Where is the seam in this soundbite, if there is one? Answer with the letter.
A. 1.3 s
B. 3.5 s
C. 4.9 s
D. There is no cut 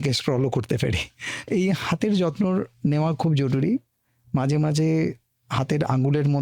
A